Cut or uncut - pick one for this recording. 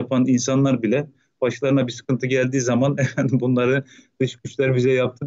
uncut